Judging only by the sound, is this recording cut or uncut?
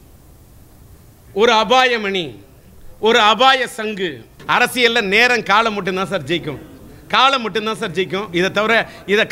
cut